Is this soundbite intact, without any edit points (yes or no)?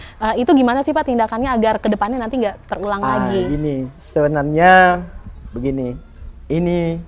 yes